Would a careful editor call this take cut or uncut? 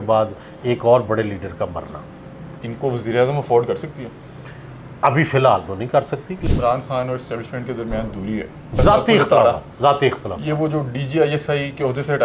cut